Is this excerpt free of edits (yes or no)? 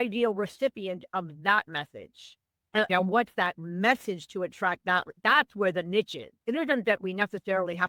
yes